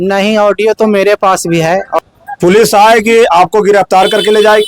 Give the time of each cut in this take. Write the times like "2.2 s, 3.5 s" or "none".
2.0 s